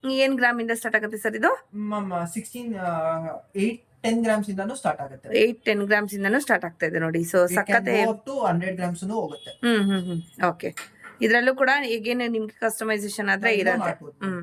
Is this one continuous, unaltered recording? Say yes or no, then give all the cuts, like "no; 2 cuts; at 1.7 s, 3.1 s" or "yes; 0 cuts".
yes; 0 cuts